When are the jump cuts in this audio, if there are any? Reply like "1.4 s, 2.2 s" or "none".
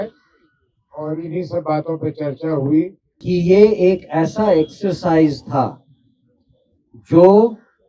3.1 s